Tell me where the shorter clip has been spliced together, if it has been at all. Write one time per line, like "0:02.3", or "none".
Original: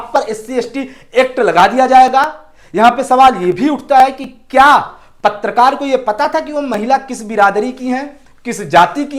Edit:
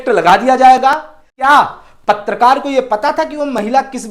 0:01.5

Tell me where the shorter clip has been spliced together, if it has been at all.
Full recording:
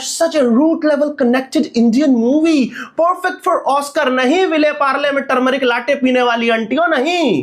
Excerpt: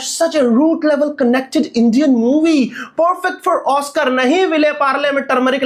none

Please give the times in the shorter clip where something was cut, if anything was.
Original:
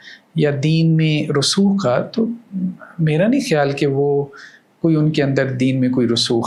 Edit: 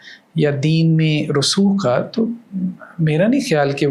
none

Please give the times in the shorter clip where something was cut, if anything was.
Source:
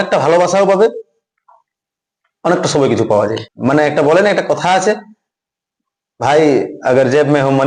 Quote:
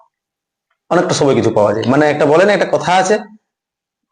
0:01.8

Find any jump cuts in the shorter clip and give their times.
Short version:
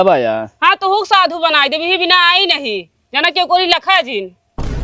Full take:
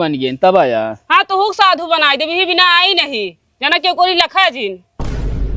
none

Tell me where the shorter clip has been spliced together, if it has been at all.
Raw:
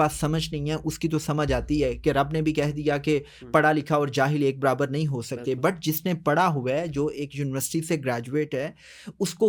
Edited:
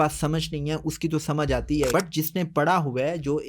0:01.9

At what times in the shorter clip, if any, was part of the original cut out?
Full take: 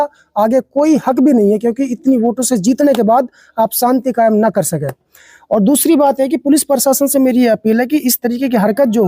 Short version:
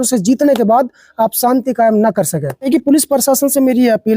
0:02.6

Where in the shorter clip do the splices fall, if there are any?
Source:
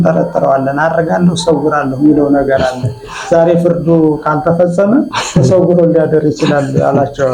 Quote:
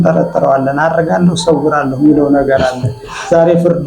none

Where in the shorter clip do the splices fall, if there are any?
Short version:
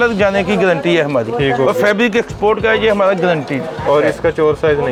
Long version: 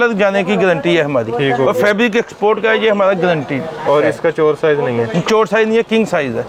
none

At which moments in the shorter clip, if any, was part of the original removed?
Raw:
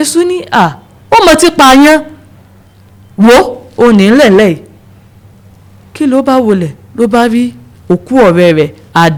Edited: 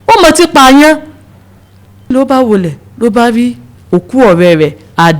0:02.1

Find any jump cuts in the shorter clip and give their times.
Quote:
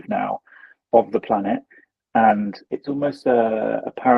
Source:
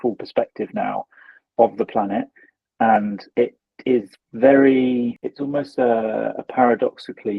0:02.6

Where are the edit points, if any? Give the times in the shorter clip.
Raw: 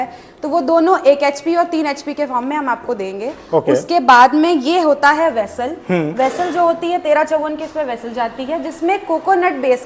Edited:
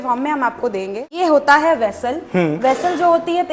0:01.1

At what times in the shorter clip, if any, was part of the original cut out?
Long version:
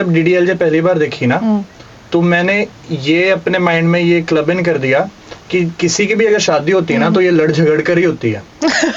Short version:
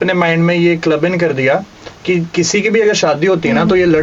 none

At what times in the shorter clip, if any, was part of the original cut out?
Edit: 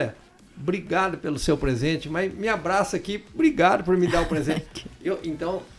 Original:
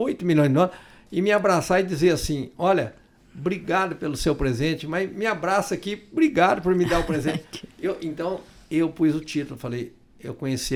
none

